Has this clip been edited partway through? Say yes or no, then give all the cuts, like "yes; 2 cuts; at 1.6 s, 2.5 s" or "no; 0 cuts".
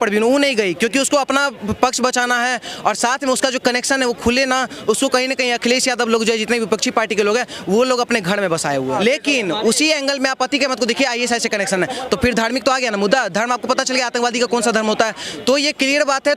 yes; 1 cut; at 9.0 s